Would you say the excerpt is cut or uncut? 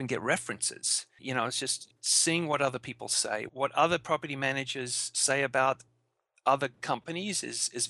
cut